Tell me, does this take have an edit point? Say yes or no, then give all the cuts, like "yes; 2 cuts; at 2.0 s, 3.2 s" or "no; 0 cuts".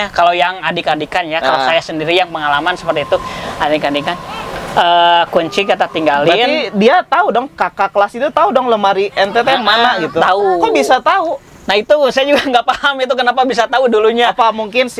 no; 0 cuts